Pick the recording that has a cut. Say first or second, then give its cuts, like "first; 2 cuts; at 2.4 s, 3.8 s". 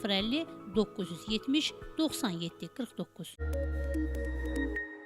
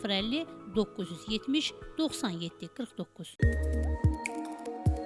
first; 1 cut; at 3.2 s